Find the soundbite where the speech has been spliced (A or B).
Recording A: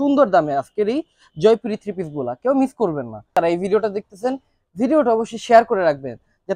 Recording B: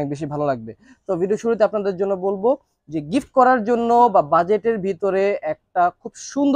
A